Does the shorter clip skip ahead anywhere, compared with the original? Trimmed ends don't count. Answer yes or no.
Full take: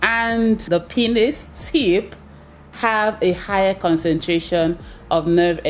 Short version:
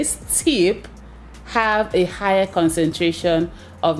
no